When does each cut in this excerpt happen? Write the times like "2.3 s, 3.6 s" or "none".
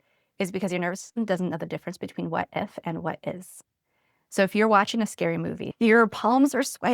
5.6 s